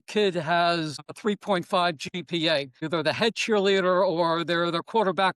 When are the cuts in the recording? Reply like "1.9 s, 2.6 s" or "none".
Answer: 1.1 s, 2.8 s